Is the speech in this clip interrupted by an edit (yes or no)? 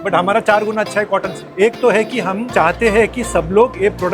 yes